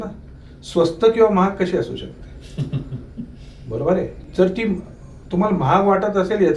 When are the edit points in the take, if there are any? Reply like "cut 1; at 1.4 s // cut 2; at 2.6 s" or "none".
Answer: cut 1; at 4.2 s